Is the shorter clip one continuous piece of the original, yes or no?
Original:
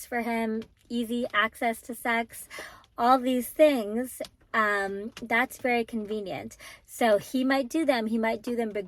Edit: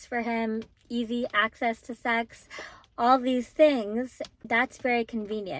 no